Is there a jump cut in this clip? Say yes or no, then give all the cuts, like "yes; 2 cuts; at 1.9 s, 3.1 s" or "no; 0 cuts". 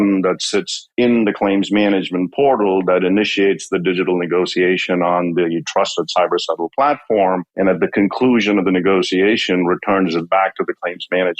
no; 0 cuts